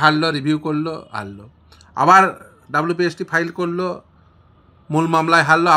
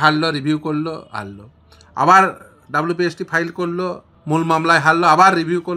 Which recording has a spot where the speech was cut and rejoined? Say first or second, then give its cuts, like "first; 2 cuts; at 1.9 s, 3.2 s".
second; 1 cut; at 4.1 s